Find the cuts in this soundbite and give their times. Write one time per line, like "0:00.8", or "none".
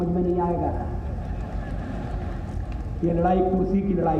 none